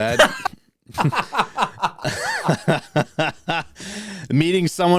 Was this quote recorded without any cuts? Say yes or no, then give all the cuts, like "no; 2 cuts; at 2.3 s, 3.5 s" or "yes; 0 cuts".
yes; 0 cuts